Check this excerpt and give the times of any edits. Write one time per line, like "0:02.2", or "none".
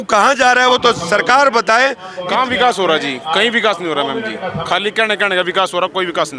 0:02.1